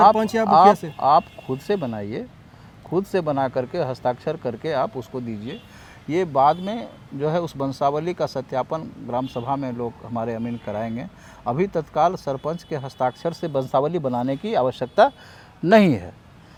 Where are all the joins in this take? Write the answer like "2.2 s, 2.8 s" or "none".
none